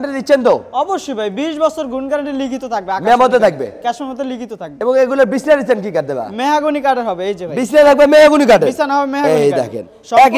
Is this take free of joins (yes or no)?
yes